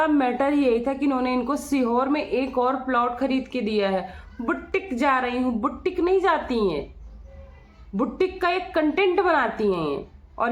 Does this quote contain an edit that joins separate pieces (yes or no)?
no